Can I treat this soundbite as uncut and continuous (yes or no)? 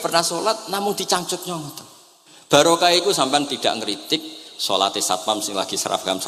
yes